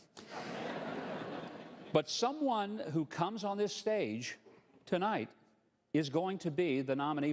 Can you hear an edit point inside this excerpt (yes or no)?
yes